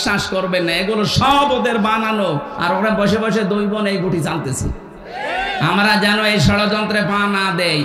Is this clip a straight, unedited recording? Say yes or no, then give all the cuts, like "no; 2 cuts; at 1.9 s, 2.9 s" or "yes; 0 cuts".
yes; 0 cuts